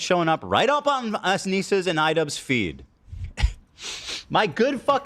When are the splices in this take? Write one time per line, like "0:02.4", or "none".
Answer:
0:02.6